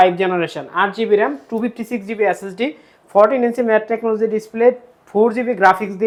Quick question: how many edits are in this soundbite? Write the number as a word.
zero